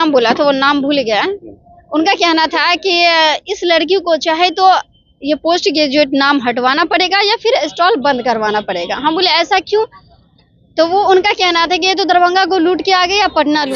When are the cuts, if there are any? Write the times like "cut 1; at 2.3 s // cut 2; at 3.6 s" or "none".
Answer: none